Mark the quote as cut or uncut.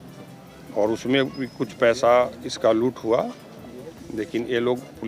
uncut